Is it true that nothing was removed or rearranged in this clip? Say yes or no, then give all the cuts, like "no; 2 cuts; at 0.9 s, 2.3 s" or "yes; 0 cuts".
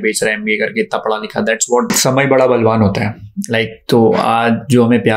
no; 1 cut; at 1.9 s